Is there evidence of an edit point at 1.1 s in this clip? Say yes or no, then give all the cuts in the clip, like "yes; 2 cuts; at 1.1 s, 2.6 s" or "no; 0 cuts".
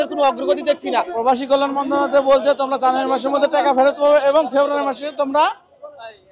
yes; 1 cut; at 1.1 s